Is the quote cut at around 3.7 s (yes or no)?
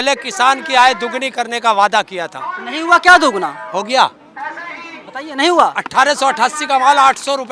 no